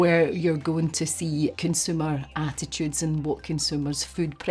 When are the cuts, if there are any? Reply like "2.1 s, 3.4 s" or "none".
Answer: 1.5 s